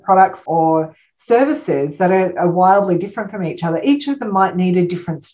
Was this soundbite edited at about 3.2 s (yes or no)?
no